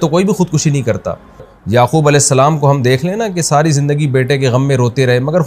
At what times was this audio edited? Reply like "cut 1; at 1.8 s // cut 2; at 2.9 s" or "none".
cut 1; at 1.5 s